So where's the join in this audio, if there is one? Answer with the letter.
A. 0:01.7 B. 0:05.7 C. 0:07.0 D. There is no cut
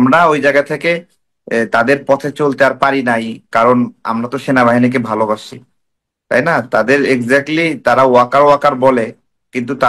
D